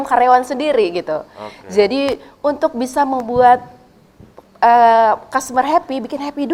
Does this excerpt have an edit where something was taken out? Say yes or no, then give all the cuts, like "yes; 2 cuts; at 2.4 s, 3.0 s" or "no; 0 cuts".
no; 0 cuts